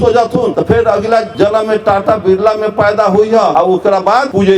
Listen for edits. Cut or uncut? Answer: cut